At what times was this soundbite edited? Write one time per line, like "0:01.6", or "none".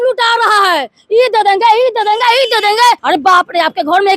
0:03.0